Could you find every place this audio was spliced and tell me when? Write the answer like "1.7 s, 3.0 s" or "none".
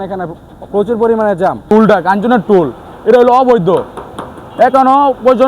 1.7 s